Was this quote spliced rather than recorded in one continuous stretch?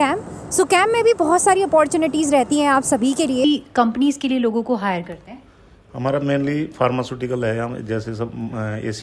yes; 1 cut; at 3.5 s

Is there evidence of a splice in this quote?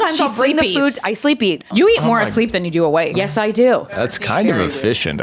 yes; 2 cuts; at 1.6 s, 3.9 s

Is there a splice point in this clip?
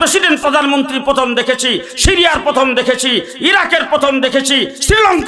no; 0 cuts

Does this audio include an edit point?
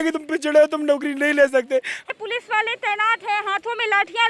yes; 1 cut; at 2.0 s

